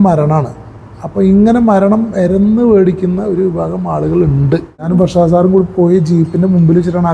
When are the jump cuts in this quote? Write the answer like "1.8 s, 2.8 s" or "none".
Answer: 4.9 s